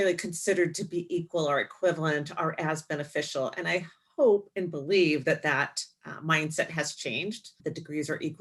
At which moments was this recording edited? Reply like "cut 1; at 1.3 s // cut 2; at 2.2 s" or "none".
cut 1; at 7.5 s